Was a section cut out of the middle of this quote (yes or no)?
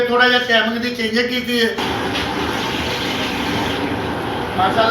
yes